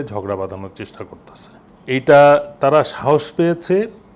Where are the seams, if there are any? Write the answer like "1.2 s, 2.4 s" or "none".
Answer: 1.7 s